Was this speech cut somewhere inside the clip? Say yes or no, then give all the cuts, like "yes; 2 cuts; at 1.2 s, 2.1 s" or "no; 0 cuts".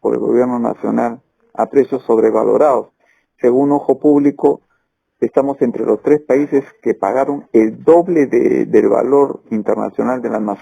no; 0 cuts